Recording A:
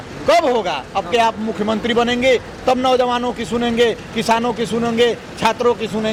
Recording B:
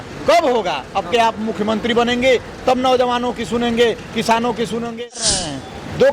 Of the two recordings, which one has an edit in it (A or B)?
B